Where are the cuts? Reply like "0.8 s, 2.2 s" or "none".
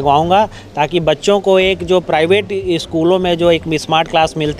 none